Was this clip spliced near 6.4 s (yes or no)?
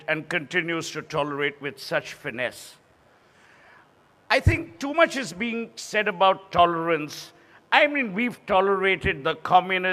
yes